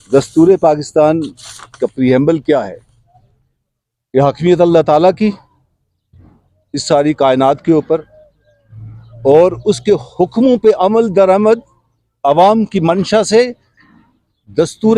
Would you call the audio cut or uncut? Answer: uncut